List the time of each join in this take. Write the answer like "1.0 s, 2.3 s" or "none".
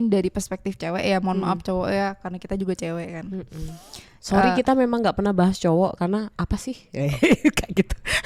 none